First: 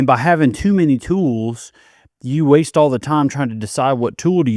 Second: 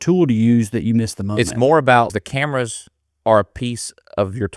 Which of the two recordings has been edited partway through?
second; 1 cut; at 2.2 s

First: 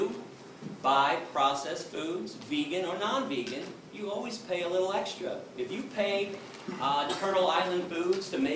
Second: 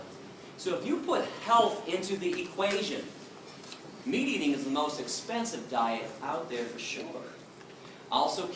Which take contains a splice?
first; 1 cut; at 4.6 s

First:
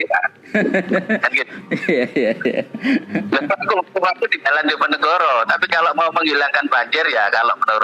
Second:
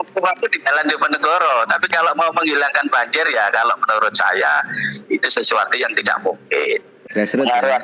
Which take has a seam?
second; 1 cut; at 6.9 s

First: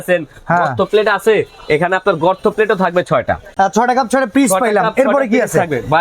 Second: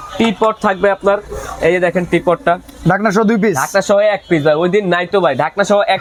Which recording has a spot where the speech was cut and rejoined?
first; 1 cut; at 3.5 s

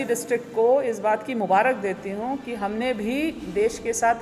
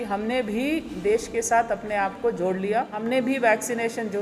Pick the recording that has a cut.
second; 1 cut; at 3.0 s

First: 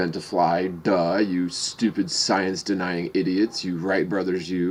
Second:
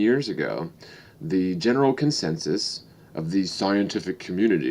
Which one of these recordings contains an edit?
second; 1 cut; at 3.5 s

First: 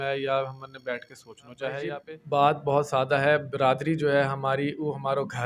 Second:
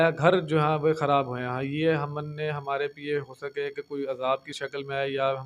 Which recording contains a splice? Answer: first; 1 cut; at 2.0 s

